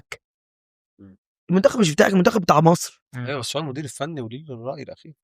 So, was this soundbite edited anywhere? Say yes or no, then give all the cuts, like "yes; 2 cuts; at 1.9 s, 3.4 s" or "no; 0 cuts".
no; 0 cuts